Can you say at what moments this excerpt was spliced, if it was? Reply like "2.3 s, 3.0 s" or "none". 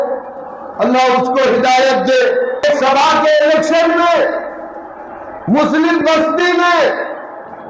2.6 s